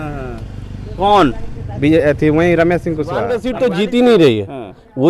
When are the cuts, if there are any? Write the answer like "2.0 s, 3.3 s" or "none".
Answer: 3.4 s